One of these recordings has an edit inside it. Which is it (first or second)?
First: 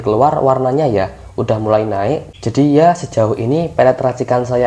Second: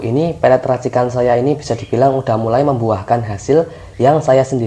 first